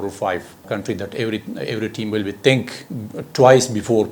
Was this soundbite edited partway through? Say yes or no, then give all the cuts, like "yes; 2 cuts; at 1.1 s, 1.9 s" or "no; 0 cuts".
no; 0 cuts